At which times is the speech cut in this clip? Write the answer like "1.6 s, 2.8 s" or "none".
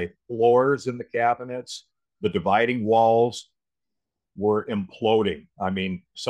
none